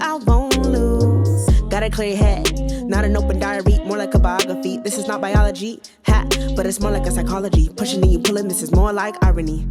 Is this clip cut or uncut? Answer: uncut